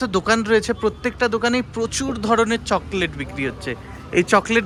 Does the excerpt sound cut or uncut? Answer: uncut